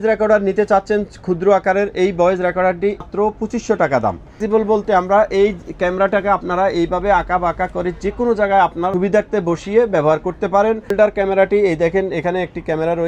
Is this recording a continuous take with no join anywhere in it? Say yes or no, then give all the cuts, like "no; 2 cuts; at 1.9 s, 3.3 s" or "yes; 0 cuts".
no; 4 cuts; at 3.1 s, 4.4 s, 8.9 s, 10.9 s